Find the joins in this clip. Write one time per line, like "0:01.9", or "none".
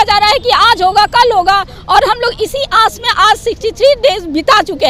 none